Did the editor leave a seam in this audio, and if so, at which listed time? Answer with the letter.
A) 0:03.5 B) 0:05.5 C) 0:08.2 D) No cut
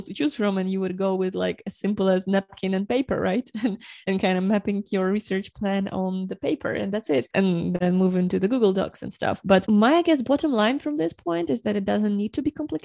D